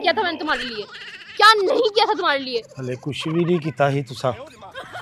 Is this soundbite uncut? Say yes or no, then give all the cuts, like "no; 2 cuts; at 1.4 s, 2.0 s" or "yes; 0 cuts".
yes; 0 cuts